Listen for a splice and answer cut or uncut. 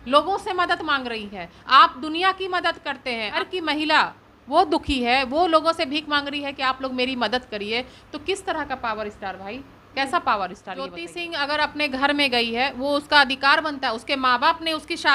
cut